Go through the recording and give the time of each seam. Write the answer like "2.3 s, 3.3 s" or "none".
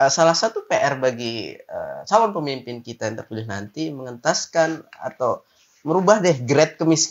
none